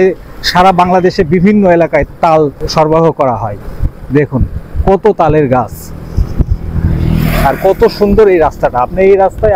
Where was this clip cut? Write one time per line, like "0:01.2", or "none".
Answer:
none